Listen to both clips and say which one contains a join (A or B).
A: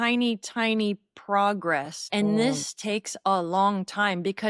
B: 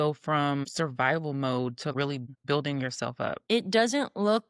B